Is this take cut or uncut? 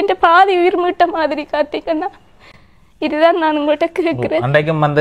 uncut